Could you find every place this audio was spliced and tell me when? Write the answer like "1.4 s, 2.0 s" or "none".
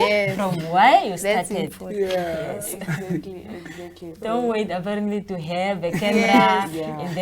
none